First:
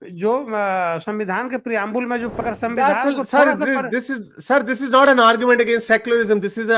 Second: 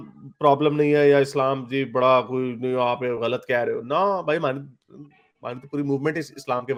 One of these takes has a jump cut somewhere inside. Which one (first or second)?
first